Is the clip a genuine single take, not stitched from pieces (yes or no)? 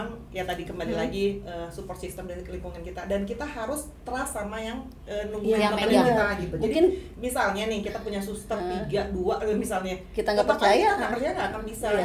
yes